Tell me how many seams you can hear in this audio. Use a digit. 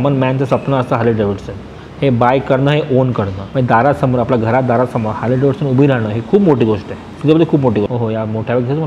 2